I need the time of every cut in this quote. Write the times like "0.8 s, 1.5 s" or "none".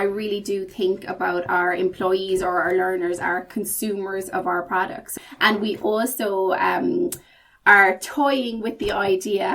5.1 s